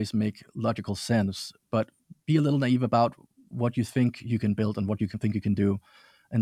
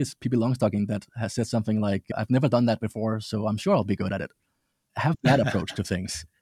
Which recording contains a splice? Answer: second; 3 cuts; at 1.1 s, 2.1 s, 4.9 s

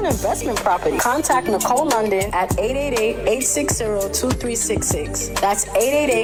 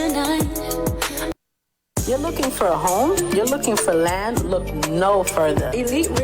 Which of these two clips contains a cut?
second; 1 cut; at 1.5 s

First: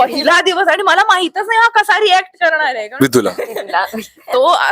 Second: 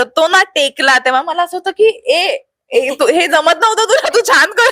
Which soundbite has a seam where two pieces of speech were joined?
first; 1 cut; at 2.8 s

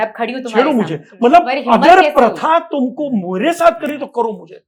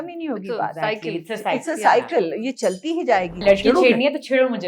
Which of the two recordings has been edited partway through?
second; 1 cut; at 3.4 s

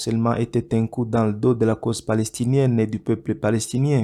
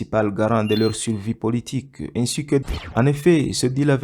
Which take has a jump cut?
second; 1 cut; at 2.6 s

